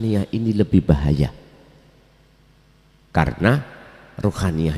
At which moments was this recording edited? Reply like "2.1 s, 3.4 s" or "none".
none